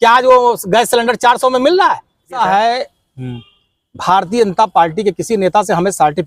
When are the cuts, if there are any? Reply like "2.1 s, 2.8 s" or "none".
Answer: 2.4 s